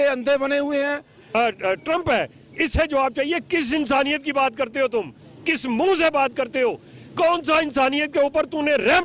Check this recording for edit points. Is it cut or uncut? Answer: cut